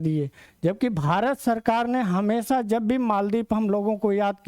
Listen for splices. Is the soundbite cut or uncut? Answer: uncut